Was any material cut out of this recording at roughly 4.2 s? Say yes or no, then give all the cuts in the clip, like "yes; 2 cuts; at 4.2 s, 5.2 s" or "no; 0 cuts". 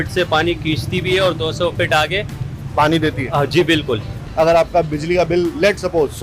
yes; 1 cut; at 4.2 s